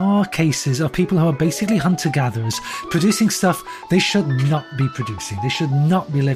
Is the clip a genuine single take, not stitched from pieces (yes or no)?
yes